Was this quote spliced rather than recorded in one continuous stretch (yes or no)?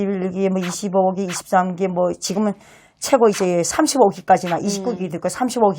no